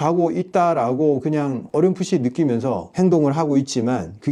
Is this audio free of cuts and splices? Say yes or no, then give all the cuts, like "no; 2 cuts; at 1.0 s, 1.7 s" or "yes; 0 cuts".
no; 2 cuts; at 1.6 s, 2.9 s